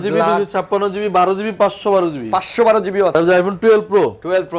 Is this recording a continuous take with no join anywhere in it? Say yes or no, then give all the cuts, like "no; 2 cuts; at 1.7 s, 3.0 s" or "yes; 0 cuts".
no; 1 cut; at 3.2 s